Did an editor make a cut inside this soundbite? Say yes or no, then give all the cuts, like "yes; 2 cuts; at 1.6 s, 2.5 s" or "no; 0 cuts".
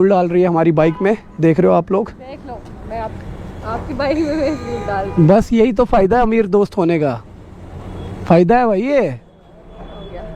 no; 0 cuts